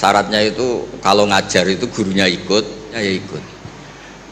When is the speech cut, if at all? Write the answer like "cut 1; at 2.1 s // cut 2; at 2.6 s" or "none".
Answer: cut 1; at 3.0 s